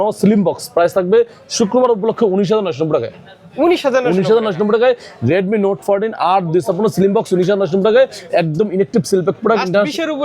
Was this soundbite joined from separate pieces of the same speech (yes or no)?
no